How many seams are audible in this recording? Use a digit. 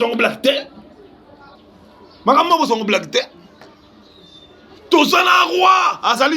1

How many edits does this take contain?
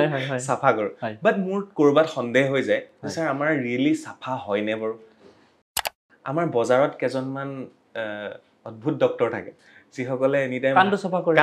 1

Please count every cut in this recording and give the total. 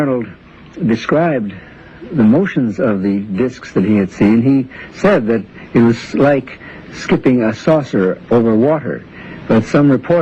1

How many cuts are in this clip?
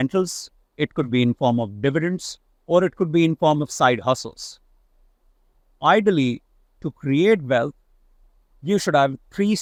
0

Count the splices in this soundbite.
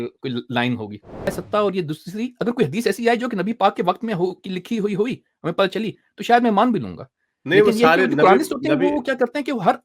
1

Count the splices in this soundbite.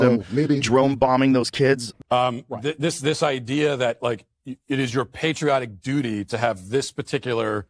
1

